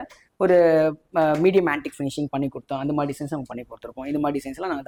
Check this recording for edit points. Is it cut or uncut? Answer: uncut